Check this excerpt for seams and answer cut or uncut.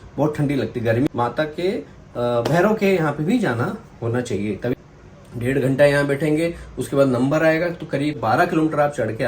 cut